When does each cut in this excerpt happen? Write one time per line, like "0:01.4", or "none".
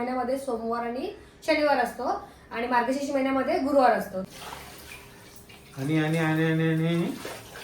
0:04.3